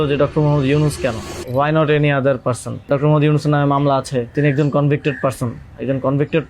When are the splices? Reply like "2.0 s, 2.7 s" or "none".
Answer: 1.3 s, 2.9 s, 4.3 s